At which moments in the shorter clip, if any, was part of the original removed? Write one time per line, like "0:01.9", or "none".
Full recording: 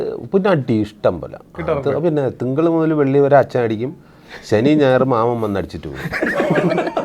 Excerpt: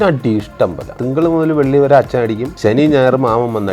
0:01.0
0:02.5